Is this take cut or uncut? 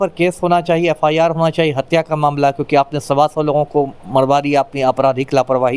uncut